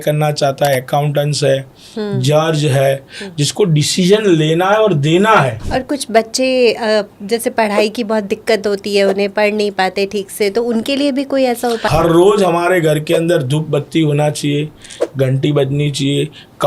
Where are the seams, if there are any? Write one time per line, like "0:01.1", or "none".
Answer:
0:05.6
0:11.8